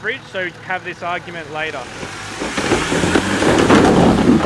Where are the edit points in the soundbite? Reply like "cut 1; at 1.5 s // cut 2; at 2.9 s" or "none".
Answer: cut 1; at 1.9 s